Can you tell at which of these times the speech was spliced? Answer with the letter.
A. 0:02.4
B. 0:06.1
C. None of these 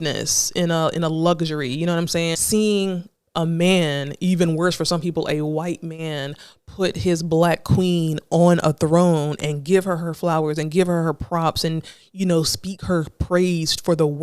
A